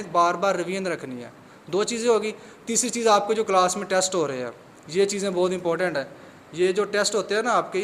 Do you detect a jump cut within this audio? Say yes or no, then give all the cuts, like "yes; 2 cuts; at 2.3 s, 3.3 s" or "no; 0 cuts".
no; 0 cuts